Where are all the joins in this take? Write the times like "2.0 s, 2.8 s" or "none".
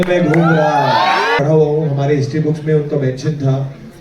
1.4 s